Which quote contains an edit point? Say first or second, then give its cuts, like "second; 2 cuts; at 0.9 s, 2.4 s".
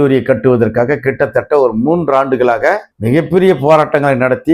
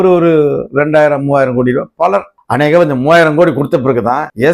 second; 1 cut; at 2.4 s